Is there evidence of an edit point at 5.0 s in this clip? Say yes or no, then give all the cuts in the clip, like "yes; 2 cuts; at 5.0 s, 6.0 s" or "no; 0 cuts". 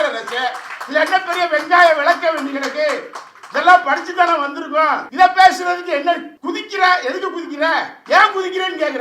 yes; 3 cuts; at 5.0 s, 6.3 s, 7.9 s